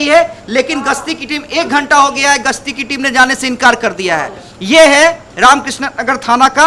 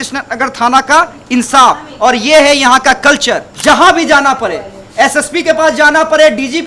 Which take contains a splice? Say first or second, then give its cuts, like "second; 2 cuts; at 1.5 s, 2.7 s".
second; 1 cut; at 3.5 s